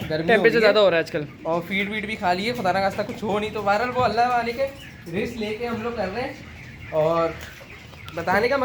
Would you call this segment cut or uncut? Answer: uncut